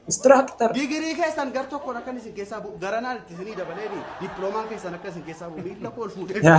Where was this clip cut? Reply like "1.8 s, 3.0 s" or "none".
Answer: none